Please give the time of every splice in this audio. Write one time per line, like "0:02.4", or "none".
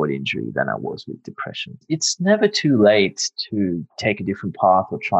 0:01.8